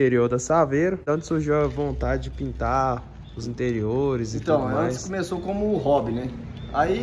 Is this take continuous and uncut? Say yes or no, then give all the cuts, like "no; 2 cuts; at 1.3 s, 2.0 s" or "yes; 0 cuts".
no; 1 cut; at 1.1 s